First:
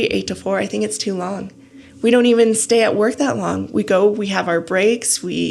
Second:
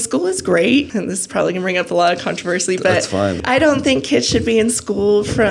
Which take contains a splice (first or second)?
second